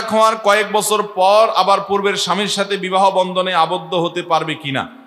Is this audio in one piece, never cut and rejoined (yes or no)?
yes